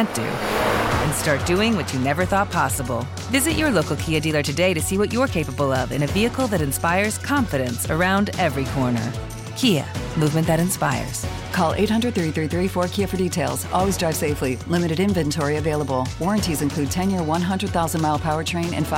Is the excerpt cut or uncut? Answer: uncut